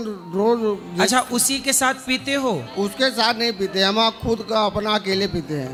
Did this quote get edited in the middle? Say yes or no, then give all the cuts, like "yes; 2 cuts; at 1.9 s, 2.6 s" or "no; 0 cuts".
no; 0 cuts